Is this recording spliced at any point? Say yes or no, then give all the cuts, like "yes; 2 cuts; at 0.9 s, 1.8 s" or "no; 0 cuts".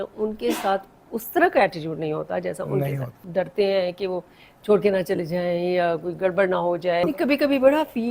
yes; 2 cuts; at 3.2 s, 7.0 s